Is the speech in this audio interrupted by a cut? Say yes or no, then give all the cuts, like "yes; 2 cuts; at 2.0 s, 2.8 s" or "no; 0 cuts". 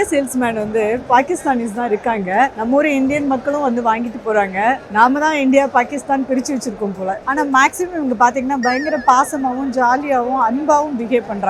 yes; 1 cut; at 7.2 s